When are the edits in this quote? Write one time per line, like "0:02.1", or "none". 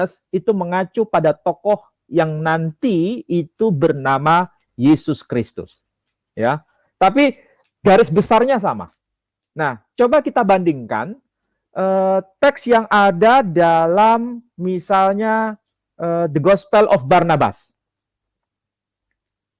none